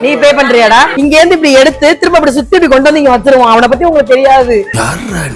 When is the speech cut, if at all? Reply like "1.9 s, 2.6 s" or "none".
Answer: 0.9 s

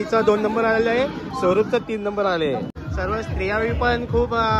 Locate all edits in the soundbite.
2.7 s

